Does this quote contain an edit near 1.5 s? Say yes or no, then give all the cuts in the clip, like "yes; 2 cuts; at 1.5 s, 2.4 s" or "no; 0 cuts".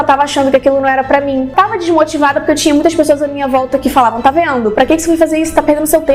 yes; 1 cut; at 1.5 s